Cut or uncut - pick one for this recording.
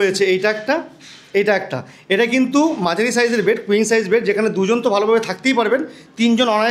uncut